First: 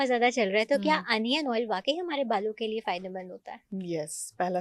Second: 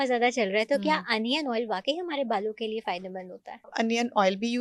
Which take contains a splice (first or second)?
second